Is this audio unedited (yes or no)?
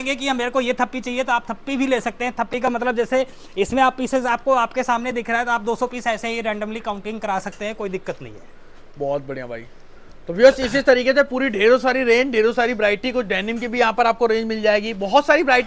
yes